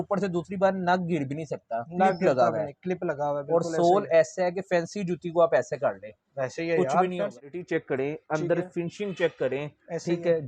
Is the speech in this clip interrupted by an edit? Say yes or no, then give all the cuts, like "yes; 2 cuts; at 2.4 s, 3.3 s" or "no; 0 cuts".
yes; 1 cut; at 7.5 s